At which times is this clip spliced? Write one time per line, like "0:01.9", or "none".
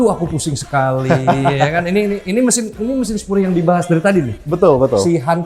none